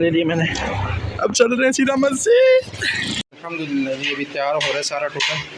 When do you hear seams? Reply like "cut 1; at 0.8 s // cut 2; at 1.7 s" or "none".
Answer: cut 1; at 3.4 s